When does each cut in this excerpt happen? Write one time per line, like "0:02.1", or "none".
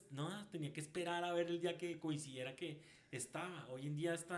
none